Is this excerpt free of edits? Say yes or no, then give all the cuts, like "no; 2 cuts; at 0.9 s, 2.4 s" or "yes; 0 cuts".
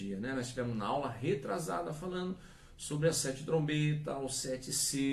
yes; 0 cuts